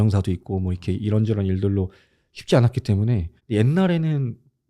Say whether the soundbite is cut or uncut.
cut